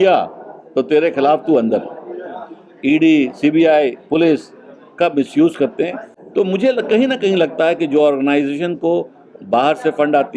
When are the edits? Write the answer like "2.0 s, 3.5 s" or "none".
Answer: none